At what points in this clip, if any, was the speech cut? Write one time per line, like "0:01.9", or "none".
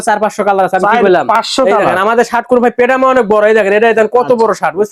none